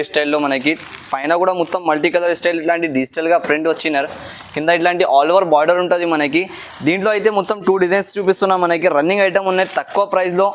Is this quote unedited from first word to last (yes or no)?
yes